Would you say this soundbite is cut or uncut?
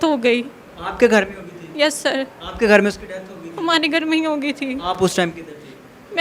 uncut